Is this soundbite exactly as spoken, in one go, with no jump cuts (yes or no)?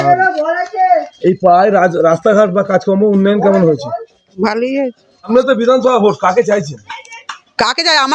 no